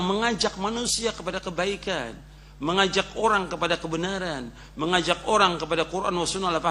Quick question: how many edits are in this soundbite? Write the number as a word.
zero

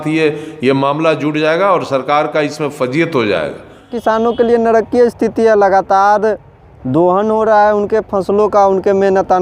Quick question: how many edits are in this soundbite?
one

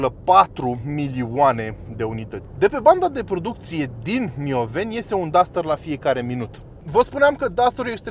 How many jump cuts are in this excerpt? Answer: two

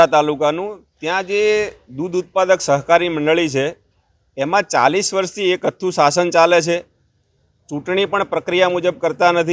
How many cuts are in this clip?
zero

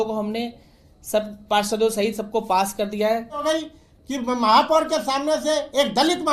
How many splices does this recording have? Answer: one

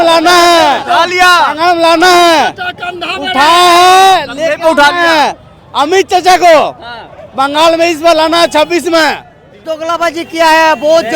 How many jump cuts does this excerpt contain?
one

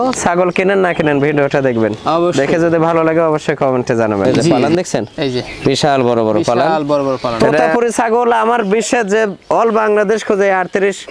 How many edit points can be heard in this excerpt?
two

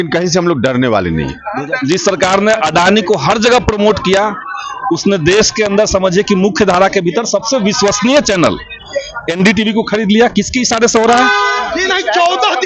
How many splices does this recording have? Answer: two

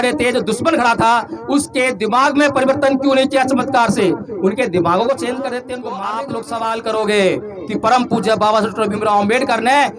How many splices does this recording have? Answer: one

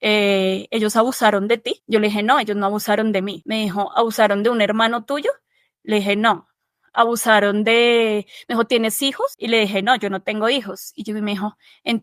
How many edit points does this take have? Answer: three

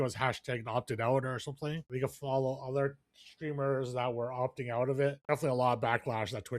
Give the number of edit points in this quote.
two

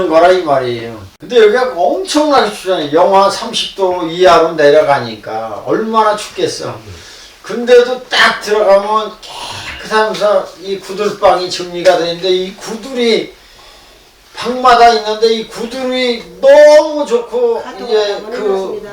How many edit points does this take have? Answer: one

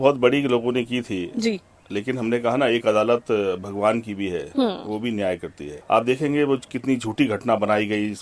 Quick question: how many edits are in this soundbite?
one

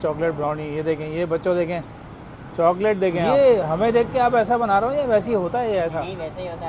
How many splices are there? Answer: one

